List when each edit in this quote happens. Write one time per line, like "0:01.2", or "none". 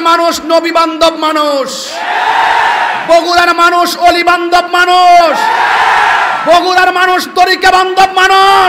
none